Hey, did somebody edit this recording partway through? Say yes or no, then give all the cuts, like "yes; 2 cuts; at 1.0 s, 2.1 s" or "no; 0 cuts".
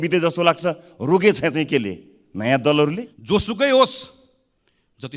yes; 1 cut; at 3.1 s